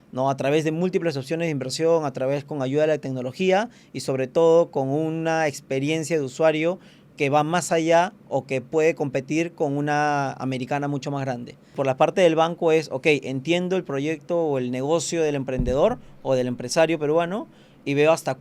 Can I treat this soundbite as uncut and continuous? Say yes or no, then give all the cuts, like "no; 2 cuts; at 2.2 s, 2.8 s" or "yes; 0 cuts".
no; 1 cut; at 11.7 s